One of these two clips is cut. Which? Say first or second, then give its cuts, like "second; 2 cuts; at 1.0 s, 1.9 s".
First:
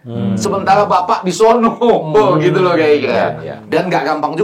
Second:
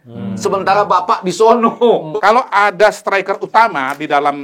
second; 1 cut; at 2.1 s